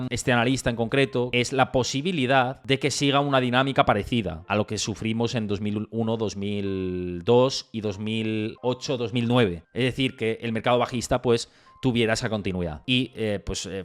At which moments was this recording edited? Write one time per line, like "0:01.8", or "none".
0:01.3

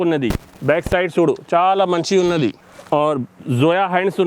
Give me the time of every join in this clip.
0:02.7

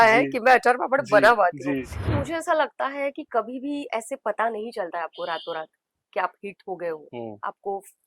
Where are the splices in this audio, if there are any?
0:02.1

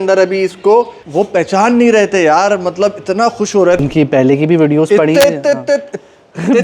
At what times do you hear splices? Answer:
0:01.0
0:03.8

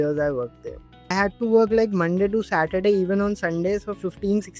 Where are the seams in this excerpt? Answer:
0:01.0

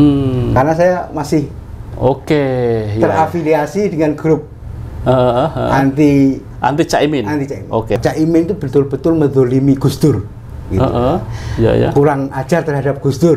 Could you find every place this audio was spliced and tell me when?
0:08.0

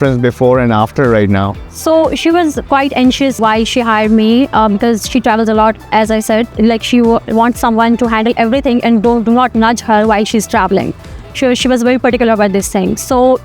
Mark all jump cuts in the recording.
0:03.4
0:06.5

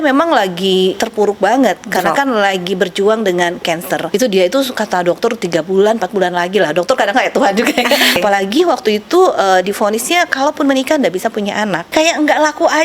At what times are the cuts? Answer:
0:01.0
0:04.1
0:08.2
0:11.9

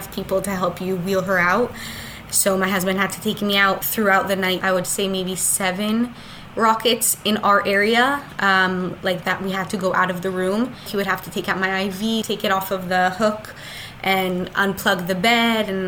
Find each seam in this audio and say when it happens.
0:03.8
0:04.6
0:10.9
0:12.2

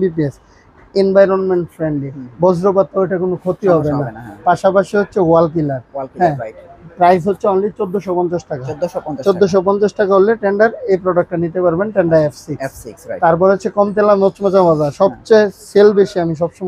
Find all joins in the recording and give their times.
none

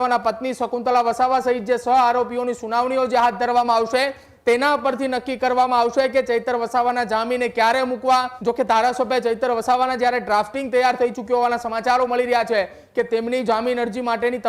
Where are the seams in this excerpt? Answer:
0:08.3

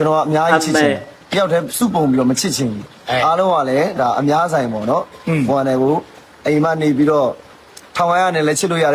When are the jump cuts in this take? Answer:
none

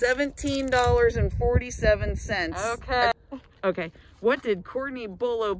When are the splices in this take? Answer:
0:03.1

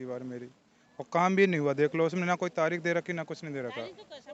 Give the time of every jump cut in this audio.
none

